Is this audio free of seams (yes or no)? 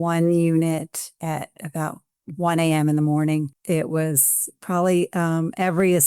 no